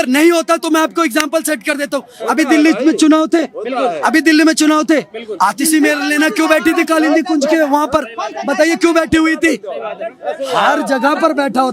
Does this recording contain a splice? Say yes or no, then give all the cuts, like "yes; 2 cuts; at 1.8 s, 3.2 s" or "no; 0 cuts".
no; 0 cuts